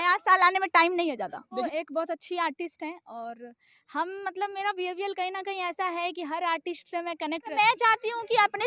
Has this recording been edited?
yes; 2 cuts; at 1.6 s, 7.5 s

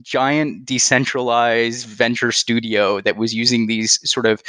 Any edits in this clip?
no; 0 cuts

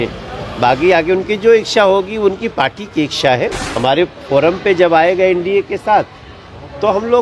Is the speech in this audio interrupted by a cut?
yes; 1 cut; at 3.6 s

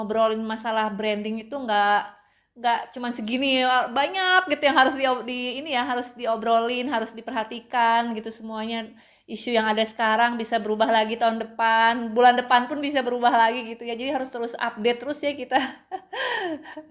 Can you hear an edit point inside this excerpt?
no; 0 cuts

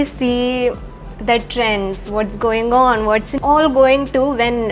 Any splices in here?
yes; 1 cut; at 3.3 s

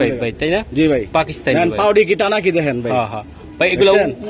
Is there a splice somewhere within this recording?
no; 0 cuts

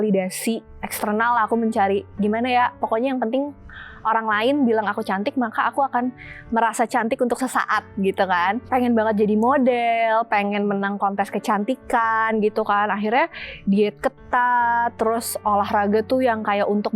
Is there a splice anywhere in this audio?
yes; 1 cut; at 8.6 s

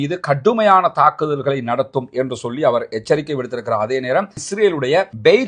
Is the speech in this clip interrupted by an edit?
yes; 1 cut; at 4.4 s

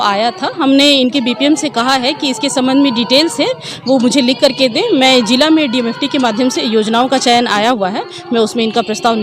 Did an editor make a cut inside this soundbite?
no; 0 cuts

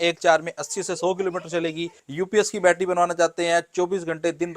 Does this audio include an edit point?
yes; 1 cut; at 2.0 s

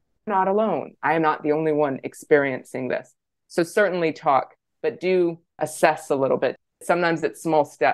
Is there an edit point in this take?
yes; 2 cuts; at 5.6 s, 6.7 s

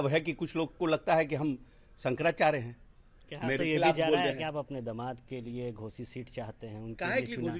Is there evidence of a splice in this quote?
no; 0 cuts

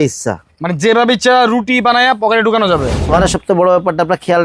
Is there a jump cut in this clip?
yes; 1 cut; at 3.0 s

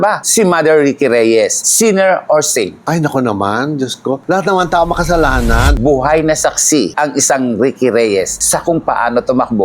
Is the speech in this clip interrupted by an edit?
yes; 1 cut; at 5.7 s

